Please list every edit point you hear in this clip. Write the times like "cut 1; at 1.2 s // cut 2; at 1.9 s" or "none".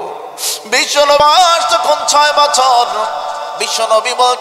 cut 1; at 1.2 s